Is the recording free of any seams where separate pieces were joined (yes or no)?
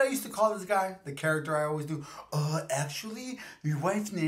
yes